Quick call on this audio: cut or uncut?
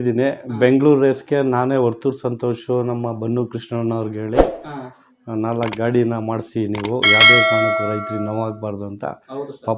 uncut